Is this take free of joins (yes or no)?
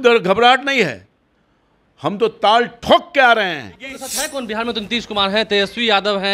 no